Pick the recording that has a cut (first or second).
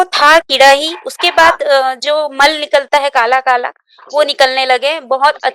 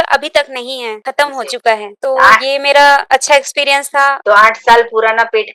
second